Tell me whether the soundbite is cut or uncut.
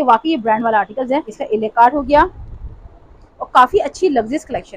cut